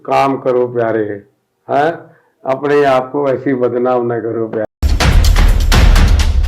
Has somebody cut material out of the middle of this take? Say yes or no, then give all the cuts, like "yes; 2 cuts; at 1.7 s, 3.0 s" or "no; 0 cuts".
yes; 1 cut; at 4.7 s